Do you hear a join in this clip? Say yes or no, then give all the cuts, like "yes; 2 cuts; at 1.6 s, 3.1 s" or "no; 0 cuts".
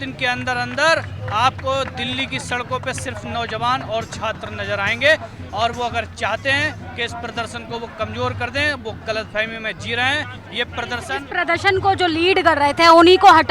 no; 0 cuts